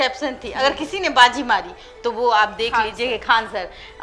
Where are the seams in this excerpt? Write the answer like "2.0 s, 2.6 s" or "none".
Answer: none